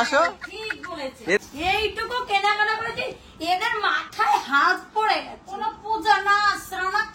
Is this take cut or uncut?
cut